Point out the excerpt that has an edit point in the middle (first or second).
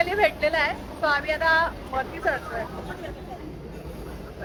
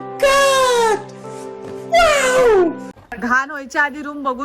second